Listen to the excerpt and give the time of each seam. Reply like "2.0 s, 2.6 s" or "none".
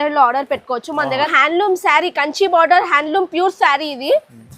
1.3 s